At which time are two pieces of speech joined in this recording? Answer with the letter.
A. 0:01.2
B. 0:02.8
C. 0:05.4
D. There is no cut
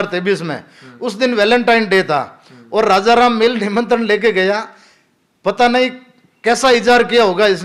D